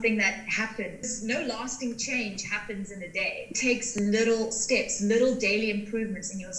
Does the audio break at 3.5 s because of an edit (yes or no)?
yes